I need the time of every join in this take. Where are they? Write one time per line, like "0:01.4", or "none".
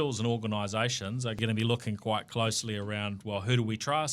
0:01.4